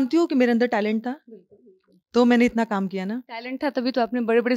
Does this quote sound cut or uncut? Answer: uncut